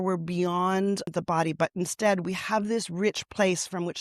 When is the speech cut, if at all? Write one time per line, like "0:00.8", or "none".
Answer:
0:01.1